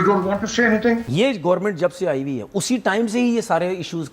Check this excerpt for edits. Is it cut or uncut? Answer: cut